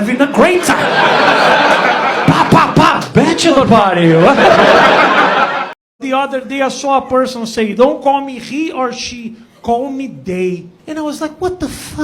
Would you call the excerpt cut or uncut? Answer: cut